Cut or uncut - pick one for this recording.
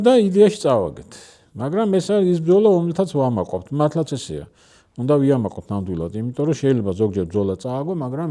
uncut